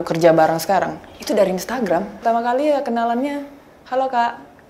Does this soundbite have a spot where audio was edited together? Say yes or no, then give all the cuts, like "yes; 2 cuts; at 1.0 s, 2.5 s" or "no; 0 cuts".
yes; 1 cut; at 2.2 s